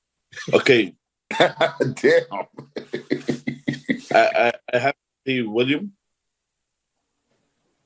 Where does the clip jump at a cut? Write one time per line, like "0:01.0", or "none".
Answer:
none